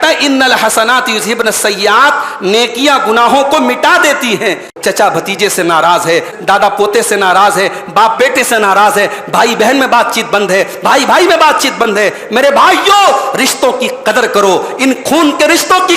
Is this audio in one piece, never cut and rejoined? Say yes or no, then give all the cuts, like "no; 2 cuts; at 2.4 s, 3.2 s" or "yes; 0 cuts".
no; 2 cuts; at 4.7 s, 6.3 s